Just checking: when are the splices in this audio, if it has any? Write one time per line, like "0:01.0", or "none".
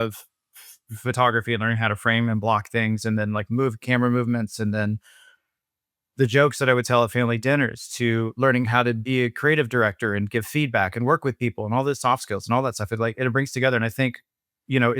none